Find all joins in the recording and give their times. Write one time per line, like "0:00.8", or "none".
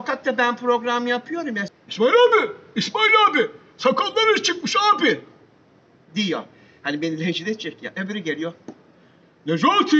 0:01.7